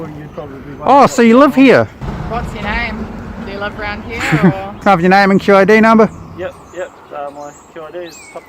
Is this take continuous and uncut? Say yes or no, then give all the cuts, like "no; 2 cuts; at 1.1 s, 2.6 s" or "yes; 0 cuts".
no; 2 cuts; at 2.0 s, 4.7 s